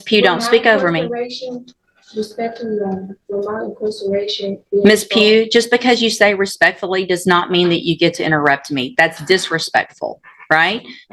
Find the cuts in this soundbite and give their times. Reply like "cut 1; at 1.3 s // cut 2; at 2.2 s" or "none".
none